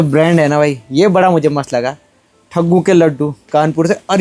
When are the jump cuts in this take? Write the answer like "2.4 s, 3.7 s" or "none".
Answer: none